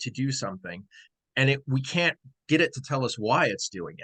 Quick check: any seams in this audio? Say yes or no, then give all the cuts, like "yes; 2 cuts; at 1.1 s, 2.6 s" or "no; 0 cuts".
no; 0 cuts